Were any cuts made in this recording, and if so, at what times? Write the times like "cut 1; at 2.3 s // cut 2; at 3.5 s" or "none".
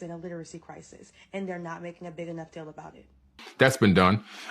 cut 1; at 3.4 s